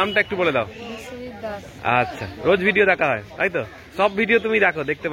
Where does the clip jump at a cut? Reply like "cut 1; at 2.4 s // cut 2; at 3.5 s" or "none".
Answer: none